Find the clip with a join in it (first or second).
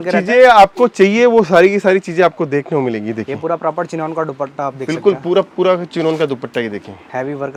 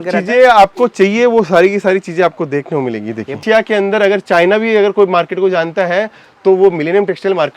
second